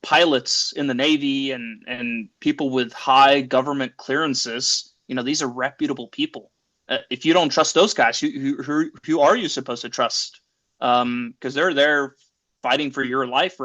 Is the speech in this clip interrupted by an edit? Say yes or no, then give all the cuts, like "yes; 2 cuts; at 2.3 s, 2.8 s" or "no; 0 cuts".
no; 0 cuts